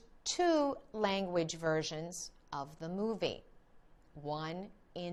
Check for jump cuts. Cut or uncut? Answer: uncut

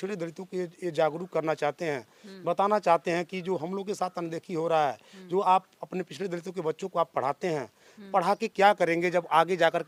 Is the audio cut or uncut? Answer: uncut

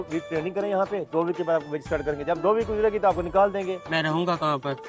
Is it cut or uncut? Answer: cut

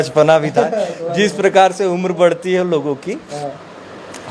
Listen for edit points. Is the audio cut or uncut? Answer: uncut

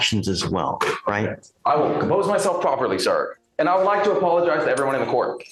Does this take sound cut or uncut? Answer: uncut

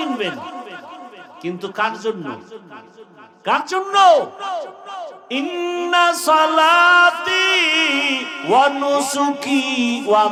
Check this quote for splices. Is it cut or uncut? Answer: uncut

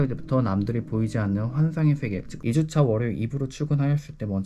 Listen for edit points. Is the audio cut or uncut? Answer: cut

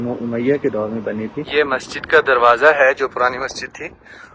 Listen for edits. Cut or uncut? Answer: cut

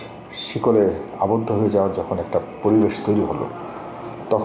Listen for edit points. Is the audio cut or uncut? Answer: uncut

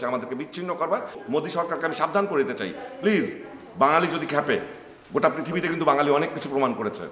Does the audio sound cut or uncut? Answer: cut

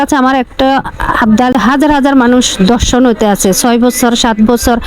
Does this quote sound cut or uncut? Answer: cut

